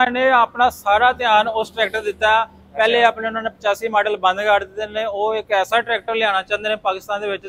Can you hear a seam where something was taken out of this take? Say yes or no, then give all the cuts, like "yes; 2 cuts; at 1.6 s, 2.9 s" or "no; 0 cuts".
no; 0 cuts